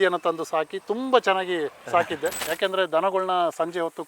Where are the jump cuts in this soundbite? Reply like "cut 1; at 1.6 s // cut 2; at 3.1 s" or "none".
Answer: cut 1; at 2.4 s